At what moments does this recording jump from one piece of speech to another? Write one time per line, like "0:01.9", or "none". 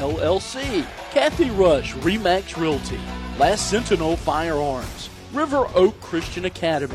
0:01.0